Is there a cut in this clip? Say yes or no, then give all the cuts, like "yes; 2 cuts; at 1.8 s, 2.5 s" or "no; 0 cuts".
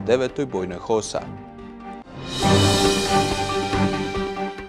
no; 0 cuts